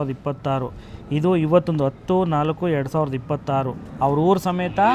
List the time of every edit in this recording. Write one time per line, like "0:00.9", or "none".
0:03.8